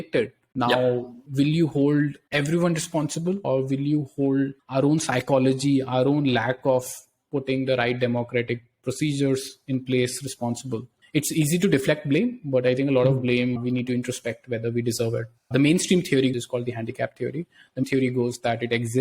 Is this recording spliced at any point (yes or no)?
yes